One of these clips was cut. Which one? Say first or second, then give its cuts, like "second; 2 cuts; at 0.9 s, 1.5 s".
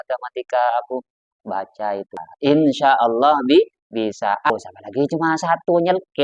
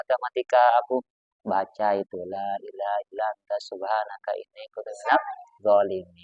first; 2 cuts; at 2.3 s, 4.5 s